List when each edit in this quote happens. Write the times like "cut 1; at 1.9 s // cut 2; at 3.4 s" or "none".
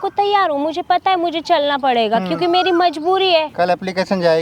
cut 1; at 3.5 s